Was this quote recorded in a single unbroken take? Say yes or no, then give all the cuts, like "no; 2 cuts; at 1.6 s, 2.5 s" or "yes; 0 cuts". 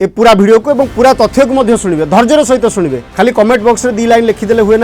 no; 1 cut; at 3.0 s